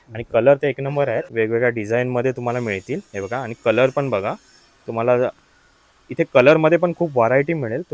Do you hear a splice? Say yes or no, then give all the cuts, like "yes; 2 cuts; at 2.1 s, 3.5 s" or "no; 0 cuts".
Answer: yes; 1 cut; at 1.3 s